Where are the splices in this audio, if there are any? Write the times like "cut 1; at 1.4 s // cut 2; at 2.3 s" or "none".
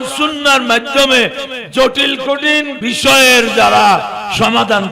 cut 1; at 2.7 s

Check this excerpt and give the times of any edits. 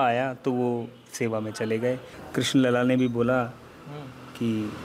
cut 1; at 2.1 s

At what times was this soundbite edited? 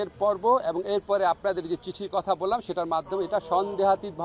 none

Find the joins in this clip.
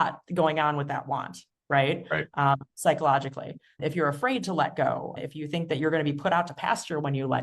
none

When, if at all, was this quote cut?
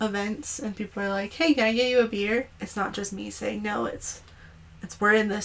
cut 1; at 2.6 s

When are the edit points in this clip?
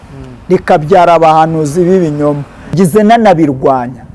cut 1; at 2.7 s

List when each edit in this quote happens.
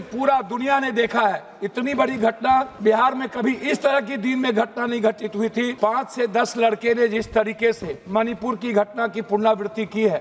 cut 1; at 2.7 s // cut 2; at 5.7 s

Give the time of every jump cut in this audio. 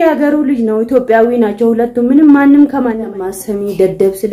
cut 1; at 3.0 s

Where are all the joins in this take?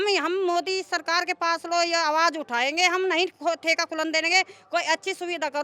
none

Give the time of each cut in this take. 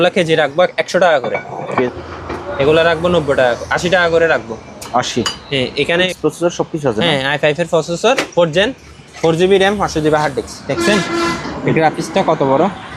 cut 1; at 1.9 s // cut 2; at 6.1 s

